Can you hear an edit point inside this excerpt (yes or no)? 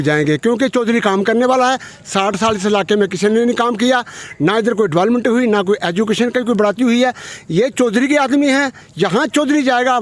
no